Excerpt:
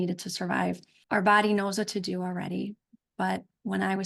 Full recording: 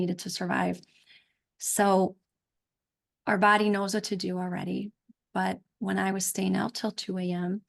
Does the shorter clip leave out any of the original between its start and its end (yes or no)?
yes